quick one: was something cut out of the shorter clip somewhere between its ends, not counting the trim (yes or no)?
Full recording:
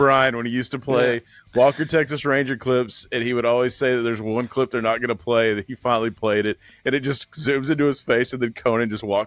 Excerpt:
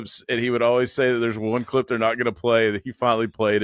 no